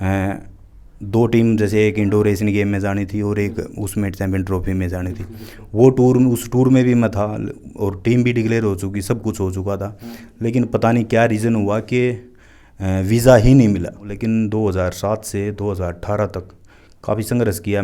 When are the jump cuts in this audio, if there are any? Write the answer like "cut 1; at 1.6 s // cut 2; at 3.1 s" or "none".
cut 1; at 14.1 s